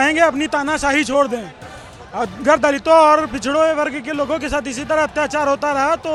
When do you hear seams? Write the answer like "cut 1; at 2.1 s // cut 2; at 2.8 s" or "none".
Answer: none